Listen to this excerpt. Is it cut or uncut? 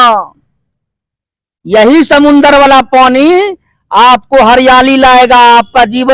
uncut